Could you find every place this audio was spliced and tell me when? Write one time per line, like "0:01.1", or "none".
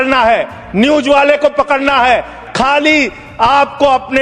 0:02.4